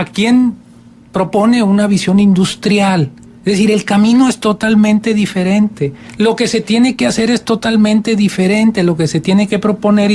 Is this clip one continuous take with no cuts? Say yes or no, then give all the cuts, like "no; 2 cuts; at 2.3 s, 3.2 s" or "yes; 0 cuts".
yes; 0 cuts